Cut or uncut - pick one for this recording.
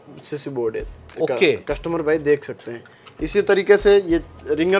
uncut